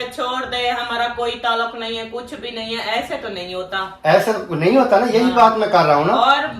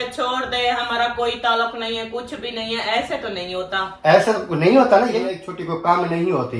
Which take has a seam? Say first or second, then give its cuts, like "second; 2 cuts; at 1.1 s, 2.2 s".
second; 1 cut; at 5.1 s